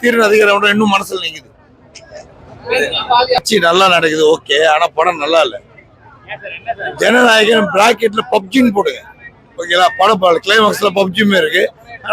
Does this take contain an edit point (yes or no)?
yes